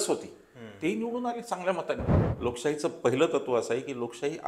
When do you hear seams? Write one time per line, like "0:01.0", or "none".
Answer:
0:02.2